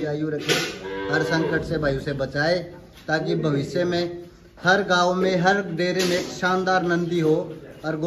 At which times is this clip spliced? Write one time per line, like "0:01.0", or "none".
none